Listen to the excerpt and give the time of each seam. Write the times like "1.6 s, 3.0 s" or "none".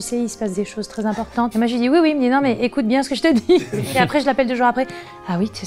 none